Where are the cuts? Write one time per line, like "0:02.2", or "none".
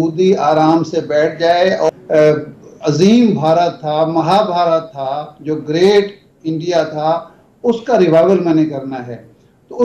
0:01.9